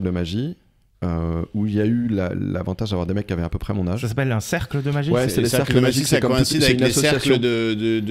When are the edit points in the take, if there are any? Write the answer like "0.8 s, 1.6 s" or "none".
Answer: none